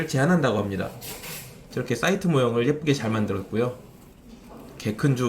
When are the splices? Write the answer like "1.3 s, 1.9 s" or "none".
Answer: 1.7 s